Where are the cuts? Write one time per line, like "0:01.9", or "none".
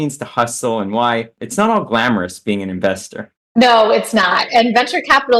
0:01.4